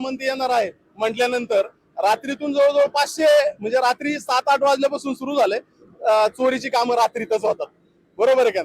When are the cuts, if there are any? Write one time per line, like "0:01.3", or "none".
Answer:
none